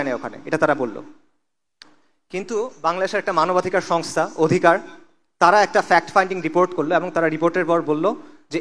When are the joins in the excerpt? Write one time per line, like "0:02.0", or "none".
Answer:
none